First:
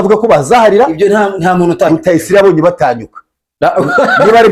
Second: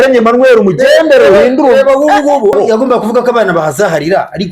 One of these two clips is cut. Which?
second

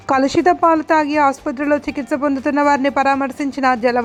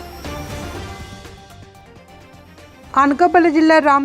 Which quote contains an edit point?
second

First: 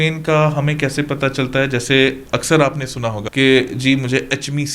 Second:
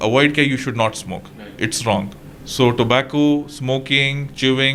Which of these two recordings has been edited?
first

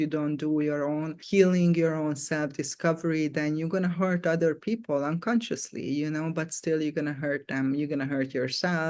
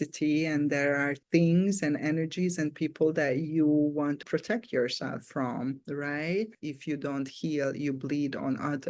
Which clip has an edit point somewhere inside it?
second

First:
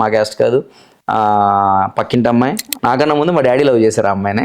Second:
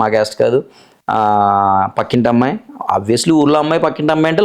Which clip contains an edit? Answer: first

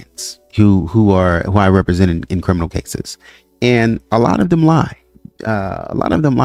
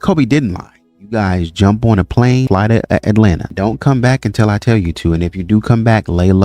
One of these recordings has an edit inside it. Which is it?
second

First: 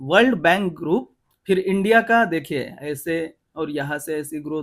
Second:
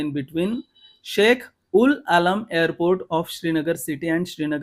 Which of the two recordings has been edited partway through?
first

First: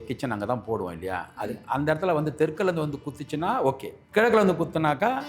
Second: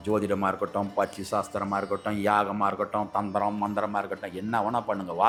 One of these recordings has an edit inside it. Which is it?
first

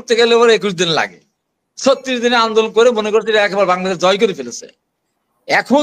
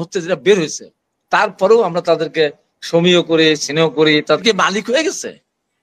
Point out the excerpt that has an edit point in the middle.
second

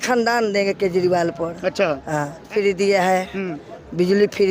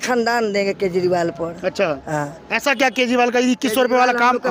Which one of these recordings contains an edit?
first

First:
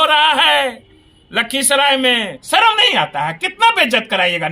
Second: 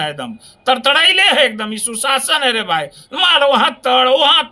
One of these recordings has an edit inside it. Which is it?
first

